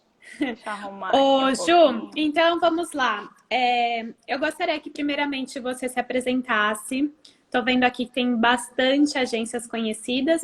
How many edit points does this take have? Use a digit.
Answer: 1